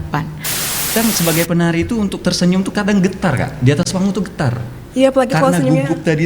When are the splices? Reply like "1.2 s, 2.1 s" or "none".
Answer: 0.9 s